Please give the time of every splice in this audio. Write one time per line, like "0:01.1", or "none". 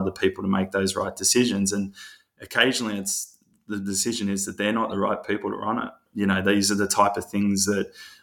0:06.0